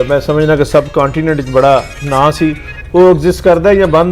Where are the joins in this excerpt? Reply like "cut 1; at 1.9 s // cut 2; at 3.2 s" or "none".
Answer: none